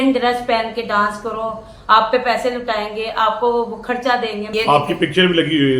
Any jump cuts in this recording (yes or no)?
yes